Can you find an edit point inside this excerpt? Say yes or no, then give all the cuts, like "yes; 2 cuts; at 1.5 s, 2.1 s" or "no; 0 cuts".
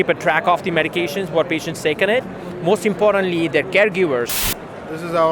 yes; 1 cut; at 4.3 s